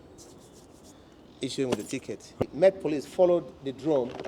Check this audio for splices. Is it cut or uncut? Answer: cut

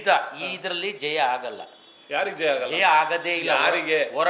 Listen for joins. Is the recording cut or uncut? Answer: uncut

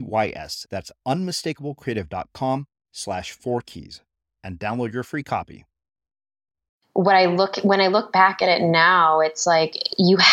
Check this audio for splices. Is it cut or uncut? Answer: cut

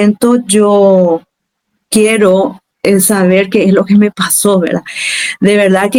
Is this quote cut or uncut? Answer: uncut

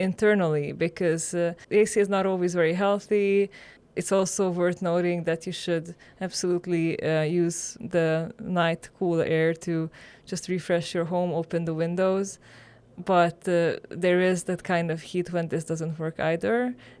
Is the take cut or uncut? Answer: cut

